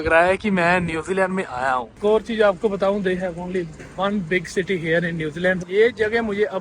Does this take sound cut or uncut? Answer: cut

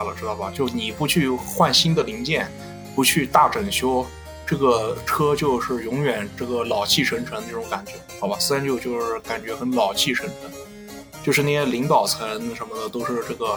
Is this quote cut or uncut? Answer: uncut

